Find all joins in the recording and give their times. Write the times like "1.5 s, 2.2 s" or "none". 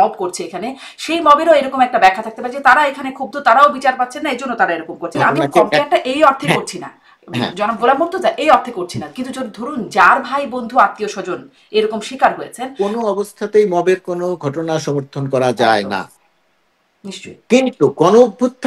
5.2 s, 12.7 s